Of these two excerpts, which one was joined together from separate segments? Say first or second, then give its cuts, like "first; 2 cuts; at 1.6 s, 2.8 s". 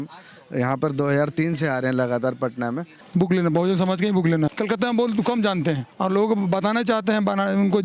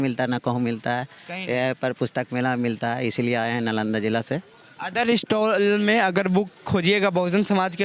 first; 3 cuts; at 2.9 s, 4.5 s, 5.9 s